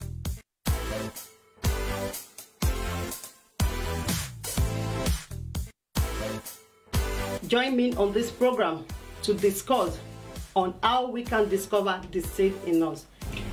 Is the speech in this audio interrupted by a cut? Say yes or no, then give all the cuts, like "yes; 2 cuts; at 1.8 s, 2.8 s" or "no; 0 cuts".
yes; 2 cuts; at 1.7 s, 7.4 s